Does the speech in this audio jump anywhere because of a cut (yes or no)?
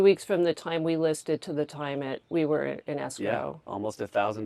yes